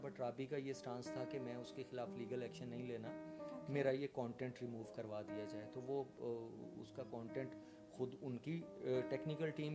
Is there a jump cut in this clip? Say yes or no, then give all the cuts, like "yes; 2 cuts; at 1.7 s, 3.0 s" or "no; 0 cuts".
no; 0 cuts